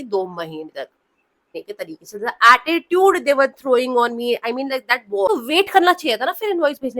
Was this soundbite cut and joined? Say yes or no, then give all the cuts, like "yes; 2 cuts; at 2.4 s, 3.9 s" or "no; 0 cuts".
yes; 2 cuts; at 1.6 s, 5.3 s